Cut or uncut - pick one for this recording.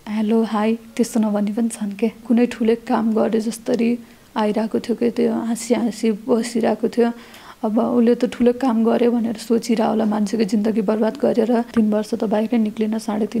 cut